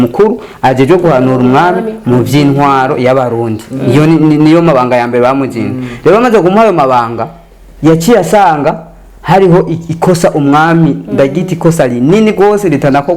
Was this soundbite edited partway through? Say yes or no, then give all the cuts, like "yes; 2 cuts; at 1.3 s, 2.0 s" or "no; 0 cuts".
no; 0 cuts